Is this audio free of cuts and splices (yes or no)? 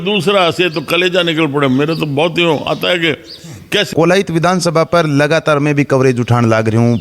no